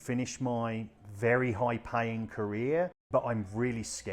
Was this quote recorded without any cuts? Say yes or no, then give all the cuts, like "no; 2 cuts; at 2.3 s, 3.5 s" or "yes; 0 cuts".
no; 2 cuts; at 1.0 s, 3.0 s